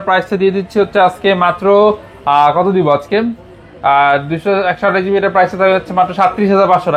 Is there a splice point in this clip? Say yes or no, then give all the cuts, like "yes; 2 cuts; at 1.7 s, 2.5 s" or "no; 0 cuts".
no; 0 cuts